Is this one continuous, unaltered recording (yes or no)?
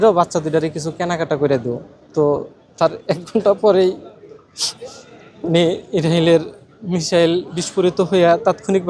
yes